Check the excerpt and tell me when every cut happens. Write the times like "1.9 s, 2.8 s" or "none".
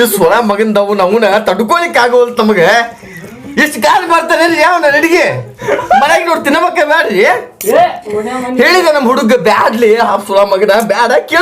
5.8 s